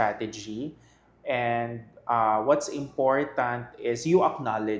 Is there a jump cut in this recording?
no; 0 cuts

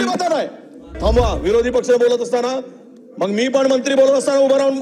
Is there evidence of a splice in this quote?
yes; 1 cut; at 0.9 s

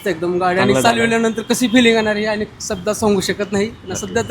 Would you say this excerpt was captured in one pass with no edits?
yes; 0 cuts

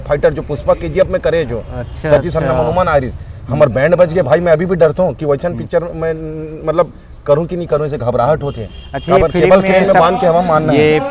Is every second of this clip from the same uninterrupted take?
yes; 0 cuts

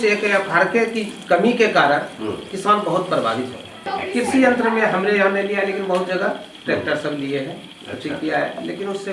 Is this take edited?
yes; 1 cut; at 3.9 s

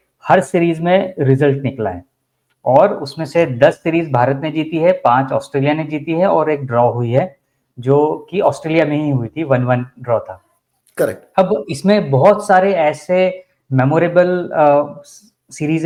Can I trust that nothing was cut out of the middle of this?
yes; 0 cuts

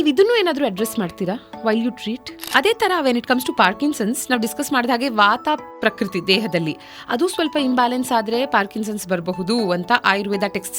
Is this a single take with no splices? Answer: no; 1 cut; at 2.5 s

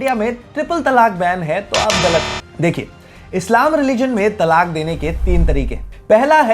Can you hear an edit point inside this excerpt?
no; 0 cuts

